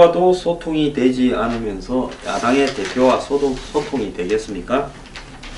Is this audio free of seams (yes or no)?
no